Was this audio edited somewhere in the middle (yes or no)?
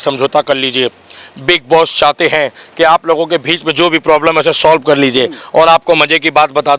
no